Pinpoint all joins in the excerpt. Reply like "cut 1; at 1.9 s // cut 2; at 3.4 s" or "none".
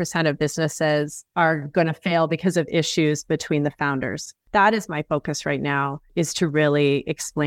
cut 1; at 1.2 s // cut 2; at 4.3 s